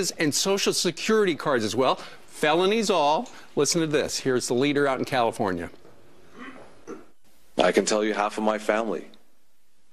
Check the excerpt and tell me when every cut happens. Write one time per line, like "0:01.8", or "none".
none

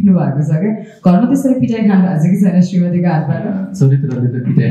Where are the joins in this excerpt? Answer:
0:03.6

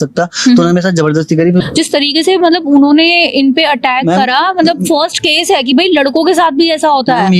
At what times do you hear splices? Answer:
0:01.7

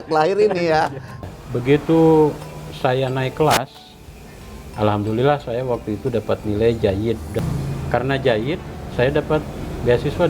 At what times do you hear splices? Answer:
0:01.3
0:07.4

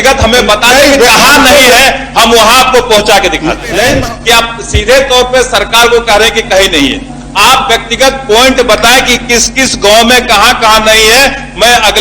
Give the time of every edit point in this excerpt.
0:03.9

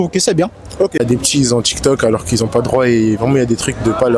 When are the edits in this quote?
0:01.0

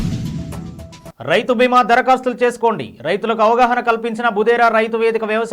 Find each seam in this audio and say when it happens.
0:01.0

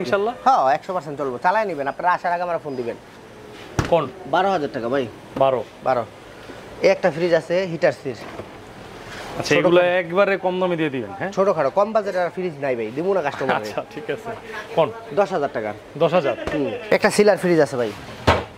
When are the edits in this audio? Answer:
none

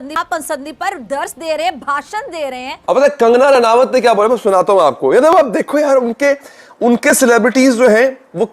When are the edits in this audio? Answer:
0:02.7

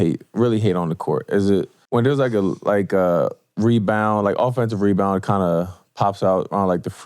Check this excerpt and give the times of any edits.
0:01.8

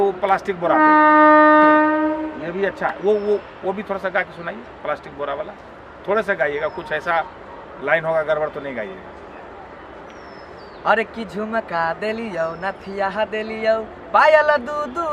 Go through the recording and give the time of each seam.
none

